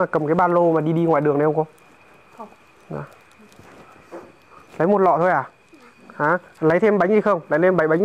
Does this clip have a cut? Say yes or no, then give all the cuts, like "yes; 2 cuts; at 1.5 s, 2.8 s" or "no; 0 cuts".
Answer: no; 0 cuts